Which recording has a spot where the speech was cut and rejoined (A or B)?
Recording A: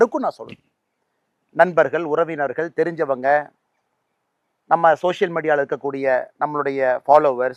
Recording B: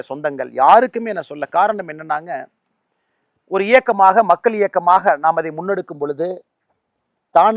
B